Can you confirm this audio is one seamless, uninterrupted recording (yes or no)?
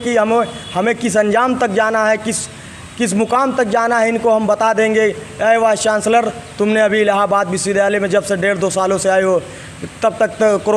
yes